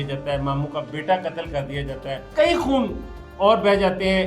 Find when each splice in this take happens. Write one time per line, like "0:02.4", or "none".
0:02.1